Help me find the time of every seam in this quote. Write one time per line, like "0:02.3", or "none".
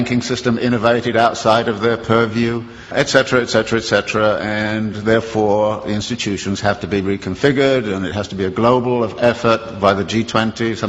none